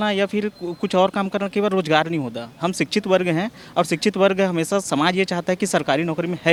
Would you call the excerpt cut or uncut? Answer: uncut